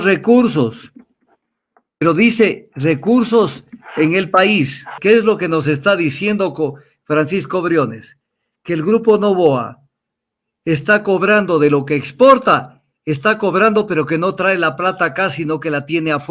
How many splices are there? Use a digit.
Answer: 1